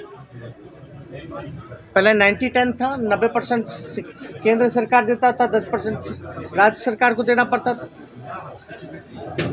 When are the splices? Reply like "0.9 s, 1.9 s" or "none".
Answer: none